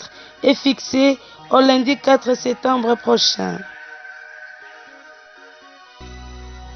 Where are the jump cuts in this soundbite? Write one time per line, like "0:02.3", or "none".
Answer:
0:03.6
0:05.5